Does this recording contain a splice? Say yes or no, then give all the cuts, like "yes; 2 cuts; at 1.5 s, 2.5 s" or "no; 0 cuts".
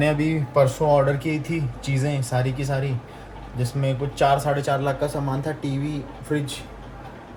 no; 0 cuts